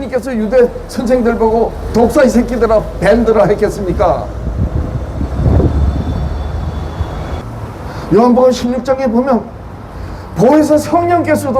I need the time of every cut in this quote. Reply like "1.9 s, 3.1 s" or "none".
7.4 s